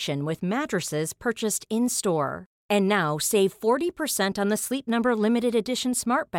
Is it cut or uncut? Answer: uncut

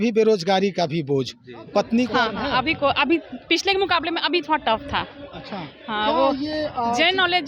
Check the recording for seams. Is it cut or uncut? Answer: cut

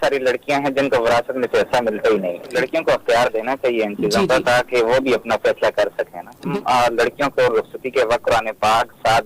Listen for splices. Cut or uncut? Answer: cut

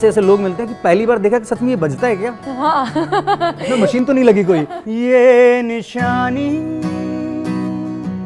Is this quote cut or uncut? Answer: cut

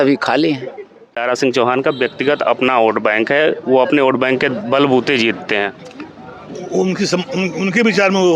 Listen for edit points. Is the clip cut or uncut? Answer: cut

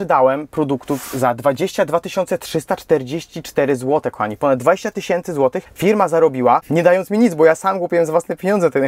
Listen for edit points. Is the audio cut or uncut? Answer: uncut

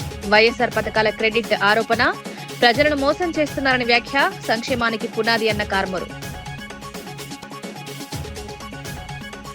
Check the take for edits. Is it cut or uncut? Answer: uncut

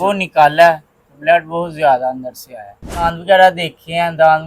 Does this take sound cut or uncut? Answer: cut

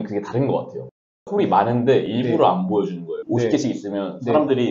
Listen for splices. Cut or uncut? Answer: cut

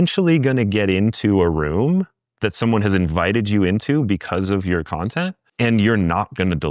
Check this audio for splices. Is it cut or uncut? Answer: cut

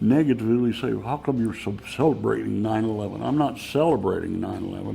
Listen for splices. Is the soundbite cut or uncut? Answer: uncut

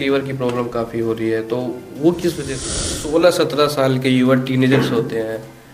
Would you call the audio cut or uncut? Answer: cut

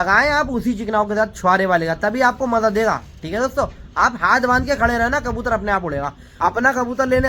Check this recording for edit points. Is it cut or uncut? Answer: cut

